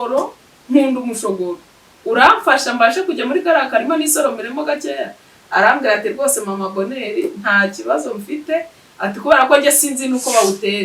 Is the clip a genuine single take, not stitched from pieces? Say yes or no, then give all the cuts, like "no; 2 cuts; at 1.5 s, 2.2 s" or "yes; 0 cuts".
yes; 0 cuts